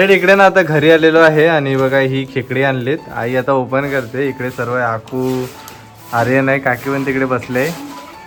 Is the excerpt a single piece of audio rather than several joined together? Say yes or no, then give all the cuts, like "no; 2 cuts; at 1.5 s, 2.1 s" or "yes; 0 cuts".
yes; 0 cuts